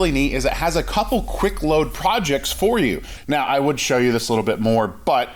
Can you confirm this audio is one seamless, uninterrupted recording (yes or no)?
no